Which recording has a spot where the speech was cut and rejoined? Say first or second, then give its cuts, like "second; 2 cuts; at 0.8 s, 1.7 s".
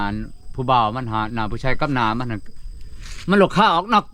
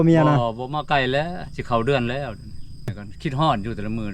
second; 1 cut; at 3.0 s